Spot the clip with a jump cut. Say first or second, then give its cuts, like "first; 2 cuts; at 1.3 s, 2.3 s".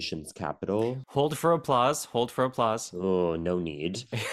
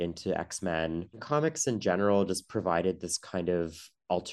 second; 1 cut; at 1.1 s